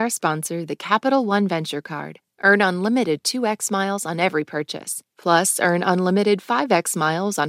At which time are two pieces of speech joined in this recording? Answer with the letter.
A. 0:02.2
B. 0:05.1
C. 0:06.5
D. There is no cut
D